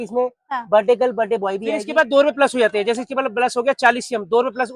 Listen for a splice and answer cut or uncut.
cut